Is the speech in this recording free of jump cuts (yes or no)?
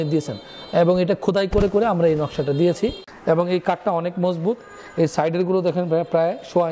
no